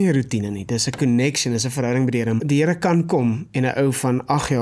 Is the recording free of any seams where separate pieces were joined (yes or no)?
no